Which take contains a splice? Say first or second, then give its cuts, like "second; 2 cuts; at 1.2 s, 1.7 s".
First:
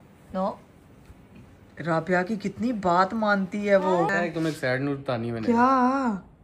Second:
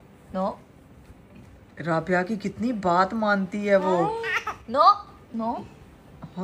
first; 1 cut; at 4.1 s